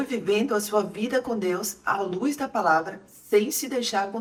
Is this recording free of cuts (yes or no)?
yes